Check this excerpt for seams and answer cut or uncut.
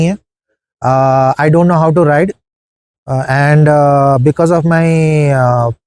uncut